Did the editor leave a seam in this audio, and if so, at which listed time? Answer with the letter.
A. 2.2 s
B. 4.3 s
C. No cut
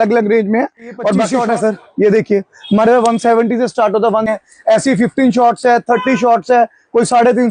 B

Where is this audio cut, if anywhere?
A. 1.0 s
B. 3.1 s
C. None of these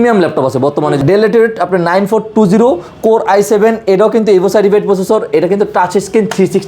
A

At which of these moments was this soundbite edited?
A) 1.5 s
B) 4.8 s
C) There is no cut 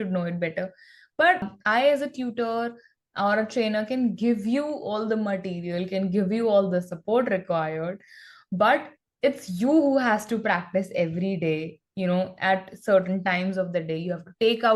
A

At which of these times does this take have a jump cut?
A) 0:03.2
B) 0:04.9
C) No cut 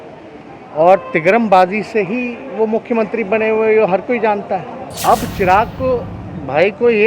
B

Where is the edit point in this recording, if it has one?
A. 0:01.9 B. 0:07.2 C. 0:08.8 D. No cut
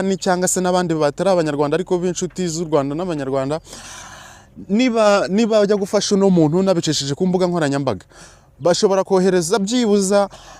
D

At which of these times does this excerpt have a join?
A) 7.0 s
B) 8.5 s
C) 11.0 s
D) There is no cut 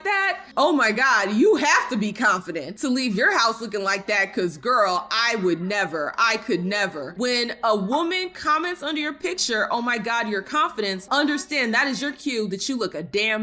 A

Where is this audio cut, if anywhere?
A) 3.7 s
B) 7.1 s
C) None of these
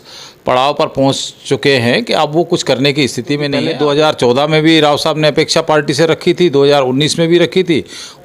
A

